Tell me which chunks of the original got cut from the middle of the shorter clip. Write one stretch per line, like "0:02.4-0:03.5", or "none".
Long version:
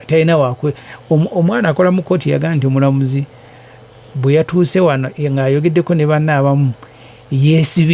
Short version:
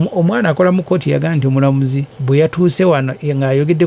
0:03.3-0:04.0